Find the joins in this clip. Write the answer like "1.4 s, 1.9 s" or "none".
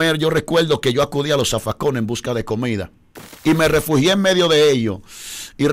3.2 s